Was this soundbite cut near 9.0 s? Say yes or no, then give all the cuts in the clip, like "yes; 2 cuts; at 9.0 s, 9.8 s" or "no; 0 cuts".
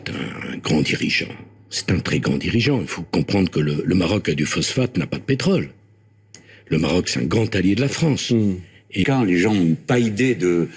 yes; 1 cut; at 9.0 s